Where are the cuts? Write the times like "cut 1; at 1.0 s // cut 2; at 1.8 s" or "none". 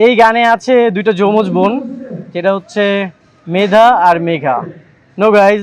none

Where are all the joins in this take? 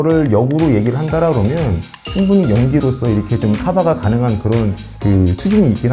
none

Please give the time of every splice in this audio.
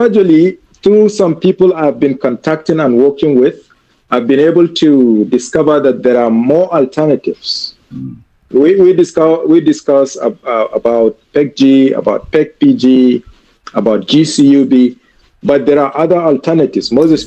none

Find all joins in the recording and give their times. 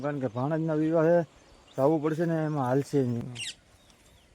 cut 1; at 3.2 s

